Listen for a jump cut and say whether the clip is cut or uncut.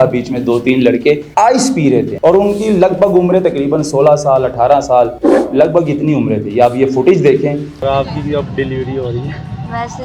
cut